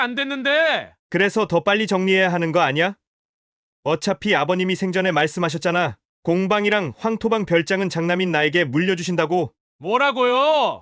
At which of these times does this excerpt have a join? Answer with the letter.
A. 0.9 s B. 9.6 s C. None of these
B